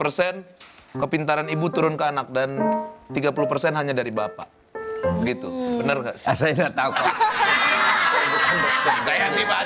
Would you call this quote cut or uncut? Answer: uncut